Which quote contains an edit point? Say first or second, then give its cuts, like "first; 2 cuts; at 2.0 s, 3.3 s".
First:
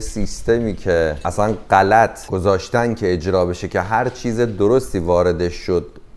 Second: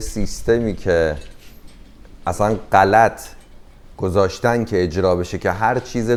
first; 2 cuts; at 1.2 s, 2.2 s